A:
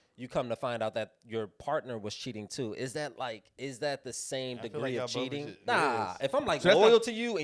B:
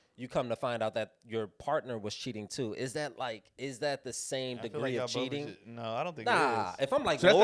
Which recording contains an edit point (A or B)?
A